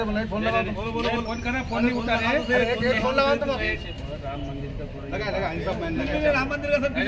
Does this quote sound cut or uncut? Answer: uncut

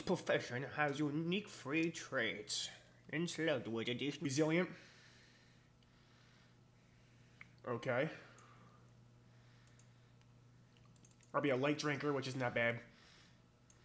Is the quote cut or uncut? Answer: uncut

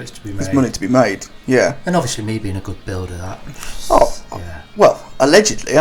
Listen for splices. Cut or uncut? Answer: uncut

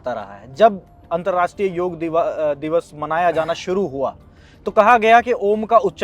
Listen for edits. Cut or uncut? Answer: uncut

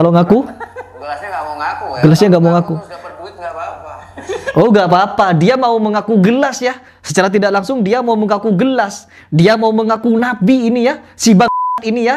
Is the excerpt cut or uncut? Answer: uncut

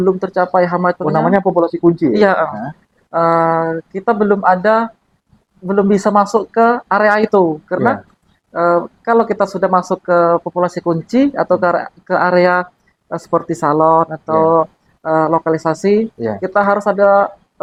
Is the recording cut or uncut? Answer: uncut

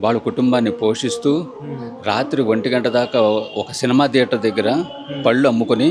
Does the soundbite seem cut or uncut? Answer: uncut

